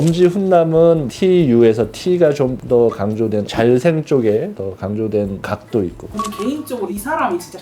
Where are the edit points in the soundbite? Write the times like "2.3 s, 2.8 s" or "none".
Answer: 1.0 s